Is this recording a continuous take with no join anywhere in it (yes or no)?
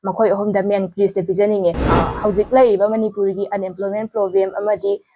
no